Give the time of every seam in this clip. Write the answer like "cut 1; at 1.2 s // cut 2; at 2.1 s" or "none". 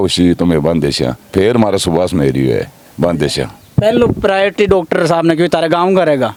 none